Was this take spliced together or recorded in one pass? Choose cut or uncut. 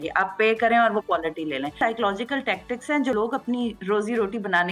cut